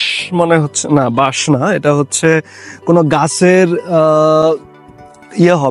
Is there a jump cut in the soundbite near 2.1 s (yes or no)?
no